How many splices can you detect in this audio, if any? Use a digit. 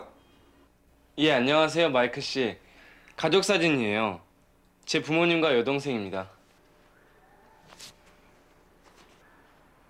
0